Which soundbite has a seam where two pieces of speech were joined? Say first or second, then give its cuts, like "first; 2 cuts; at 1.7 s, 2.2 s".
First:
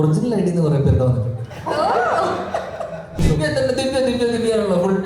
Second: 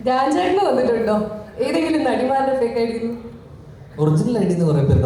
first; 1 cut; at 3.2 s